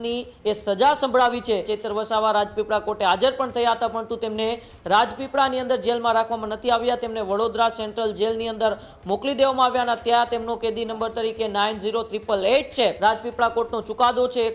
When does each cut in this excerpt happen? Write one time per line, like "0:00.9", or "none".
0:01.7
0:13.0